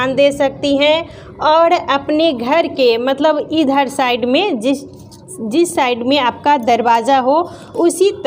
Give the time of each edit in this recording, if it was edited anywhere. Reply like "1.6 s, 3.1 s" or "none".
none